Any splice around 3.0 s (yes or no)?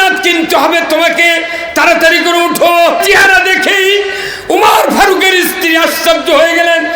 yes